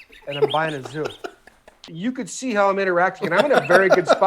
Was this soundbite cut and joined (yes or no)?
yes